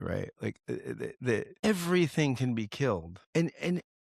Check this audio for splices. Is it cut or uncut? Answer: cut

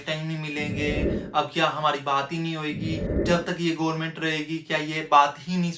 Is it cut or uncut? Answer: cut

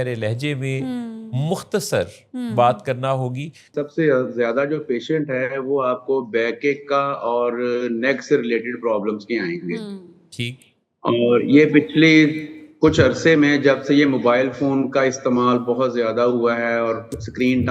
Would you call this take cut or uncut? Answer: cut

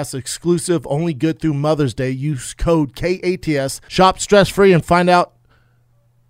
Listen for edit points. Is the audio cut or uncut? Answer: cut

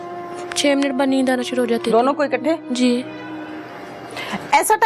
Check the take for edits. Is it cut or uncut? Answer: uncut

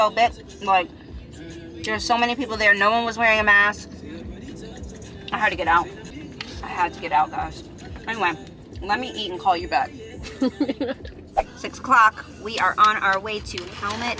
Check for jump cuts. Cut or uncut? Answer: uncut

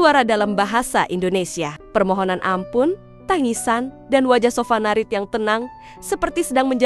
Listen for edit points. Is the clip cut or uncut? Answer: uncut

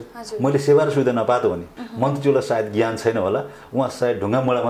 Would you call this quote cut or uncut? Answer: cut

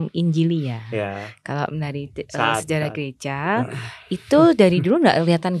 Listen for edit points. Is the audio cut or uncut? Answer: uncut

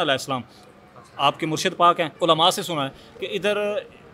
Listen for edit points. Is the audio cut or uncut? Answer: cut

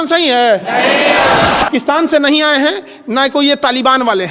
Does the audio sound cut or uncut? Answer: cut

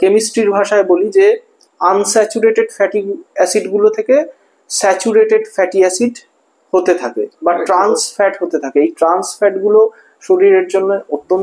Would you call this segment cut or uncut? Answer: uncut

